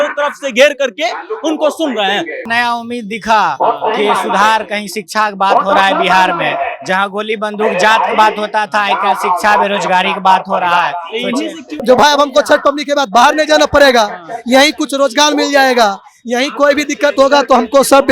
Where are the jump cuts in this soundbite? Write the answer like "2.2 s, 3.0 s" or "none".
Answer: 2.5 s, 11.6 s